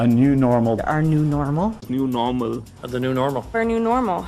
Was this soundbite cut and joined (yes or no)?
no